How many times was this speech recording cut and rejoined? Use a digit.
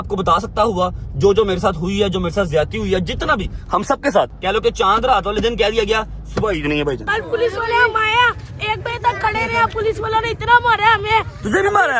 2